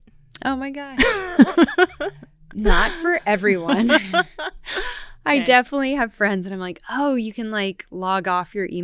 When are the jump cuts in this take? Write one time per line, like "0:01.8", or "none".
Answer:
none